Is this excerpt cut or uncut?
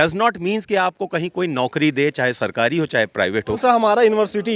cut